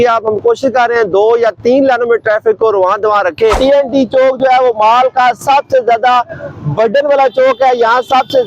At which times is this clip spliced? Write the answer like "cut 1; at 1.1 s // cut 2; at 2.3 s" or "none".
cut 1; at 3.6 s